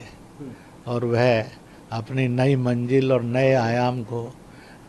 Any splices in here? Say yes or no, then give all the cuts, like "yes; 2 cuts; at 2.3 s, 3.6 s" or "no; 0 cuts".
no; 0 cuts